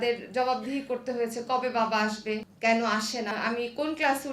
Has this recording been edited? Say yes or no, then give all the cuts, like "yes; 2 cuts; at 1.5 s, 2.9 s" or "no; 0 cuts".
yes; 2 cuts; at 2.5 s, 3.3 s